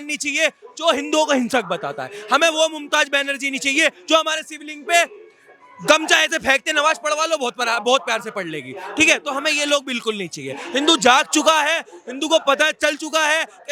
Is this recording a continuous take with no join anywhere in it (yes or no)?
yes